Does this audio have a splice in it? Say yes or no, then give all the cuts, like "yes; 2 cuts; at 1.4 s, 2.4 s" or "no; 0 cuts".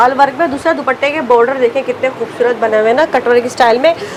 no; 0 cuts